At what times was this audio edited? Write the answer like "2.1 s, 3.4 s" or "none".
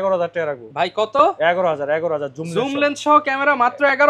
none